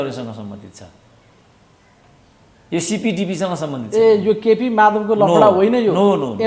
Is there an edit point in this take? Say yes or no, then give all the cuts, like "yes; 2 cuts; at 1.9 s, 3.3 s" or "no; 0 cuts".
no; 0 cuts